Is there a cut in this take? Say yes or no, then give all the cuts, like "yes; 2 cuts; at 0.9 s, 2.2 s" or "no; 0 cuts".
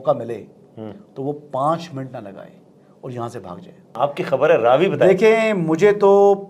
yes; 1 cut; at 3.9 s